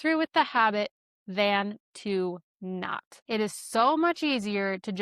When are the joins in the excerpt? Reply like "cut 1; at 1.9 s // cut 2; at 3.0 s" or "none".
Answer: cut 1; at 3.1 s